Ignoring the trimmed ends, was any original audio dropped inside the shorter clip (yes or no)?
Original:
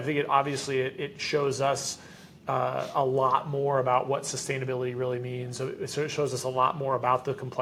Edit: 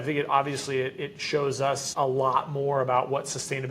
yes